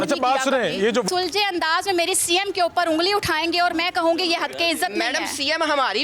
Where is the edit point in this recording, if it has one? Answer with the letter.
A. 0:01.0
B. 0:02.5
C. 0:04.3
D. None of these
A